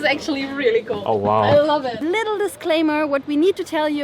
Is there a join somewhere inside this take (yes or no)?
yes